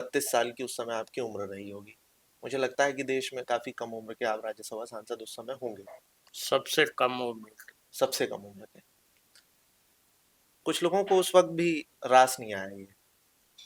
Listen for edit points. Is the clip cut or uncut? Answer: uncut